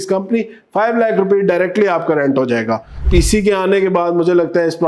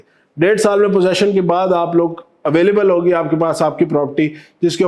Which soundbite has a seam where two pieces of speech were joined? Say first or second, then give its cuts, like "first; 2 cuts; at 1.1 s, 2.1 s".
first; 1 cut; at 3.0 s